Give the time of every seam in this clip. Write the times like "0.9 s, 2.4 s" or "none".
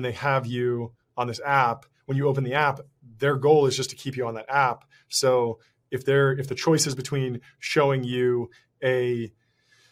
none

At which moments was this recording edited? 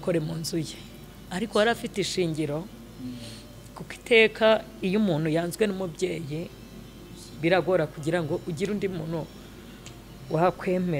none

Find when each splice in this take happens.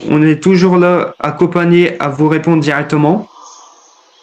none

